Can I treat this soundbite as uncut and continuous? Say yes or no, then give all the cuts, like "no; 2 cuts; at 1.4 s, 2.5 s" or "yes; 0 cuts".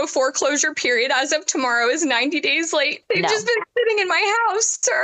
no; 1 cut; at 3.0 s